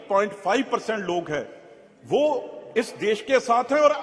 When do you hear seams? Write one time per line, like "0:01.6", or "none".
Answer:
none